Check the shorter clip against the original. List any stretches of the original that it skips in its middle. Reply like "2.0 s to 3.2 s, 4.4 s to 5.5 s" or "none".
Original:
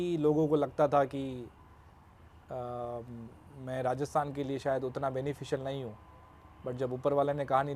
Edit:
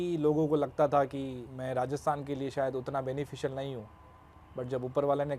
1.5 s to 3.6 s